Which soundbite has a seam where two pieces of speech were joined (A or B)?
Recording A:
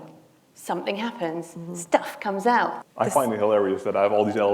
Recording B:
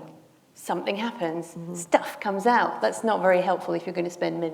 A